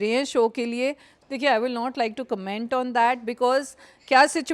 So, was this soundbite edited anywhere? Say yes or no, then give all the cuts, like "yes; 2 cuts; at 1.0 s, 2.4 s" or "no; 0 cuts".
yes; 1 cut; at 1.1 s